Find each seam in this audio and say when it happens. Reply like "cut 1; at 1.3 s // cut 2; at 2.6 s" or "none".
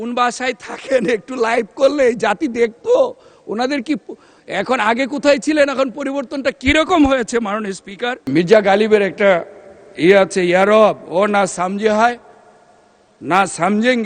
cut 1; at 8.2 s